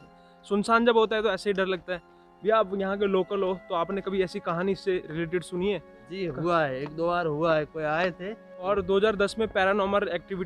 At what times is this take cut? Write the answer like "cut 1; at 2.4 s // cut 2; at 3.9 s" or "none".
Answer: cut 1; at 8.7 s

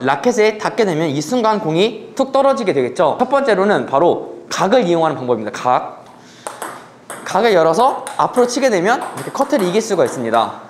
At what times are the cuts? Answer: cut 1; at 3.2 s // cut 2; at 5.9 s

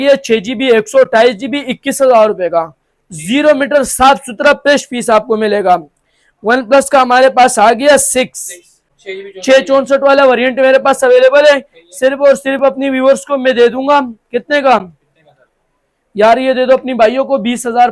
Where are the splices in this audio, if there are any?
none

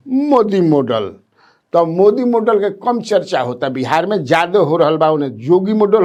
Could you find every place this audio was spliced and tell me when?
none

